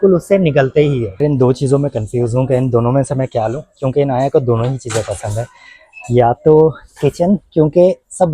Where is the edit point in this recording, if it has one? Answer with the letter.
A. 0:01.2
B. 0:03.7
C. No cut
A